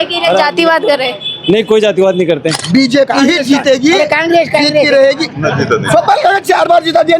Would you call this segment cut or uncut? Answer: cut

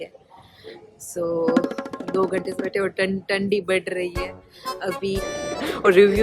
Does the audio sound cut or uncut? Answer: cut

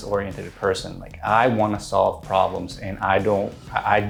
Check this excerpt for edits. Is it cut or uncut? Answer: uncut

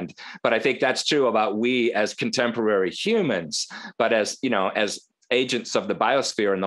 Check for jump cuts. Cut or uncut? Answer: uncut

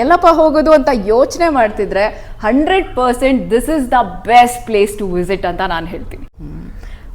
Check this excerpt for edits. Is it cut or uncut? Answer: cut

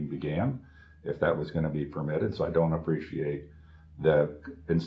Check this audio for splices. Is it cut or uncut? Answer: uncut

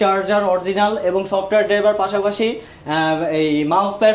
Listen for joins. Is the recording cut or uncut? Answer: uncut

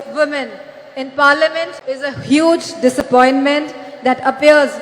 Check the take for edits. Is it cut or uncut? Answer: cut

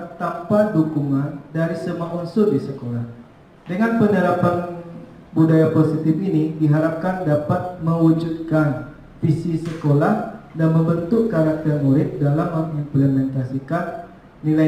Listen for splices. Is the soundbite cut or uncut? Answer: uncut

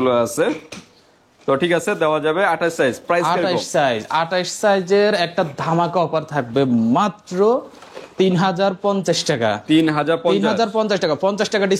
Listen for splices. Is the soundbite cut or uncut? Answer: uncut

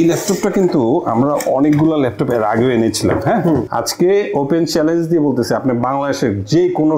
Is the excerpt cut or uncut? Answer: cut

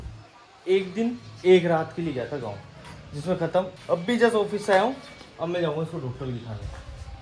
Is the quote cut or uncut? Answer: uncut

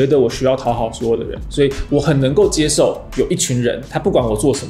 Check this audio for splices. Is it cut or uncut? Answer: uncut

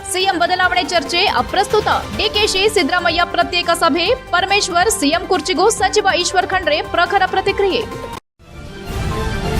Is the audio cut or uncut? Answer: cut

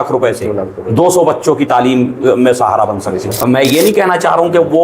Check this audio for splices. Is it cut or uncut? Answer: cut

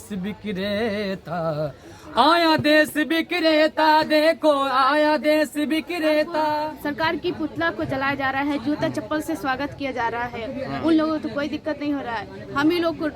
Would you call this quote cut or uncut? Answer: cut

